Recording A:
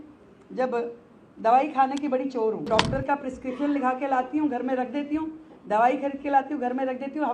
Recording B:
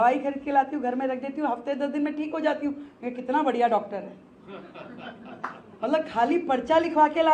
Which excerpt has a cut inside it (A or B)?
A